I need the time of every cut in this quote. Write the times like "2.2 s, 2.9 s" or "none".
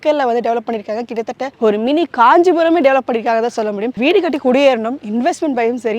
3.9 s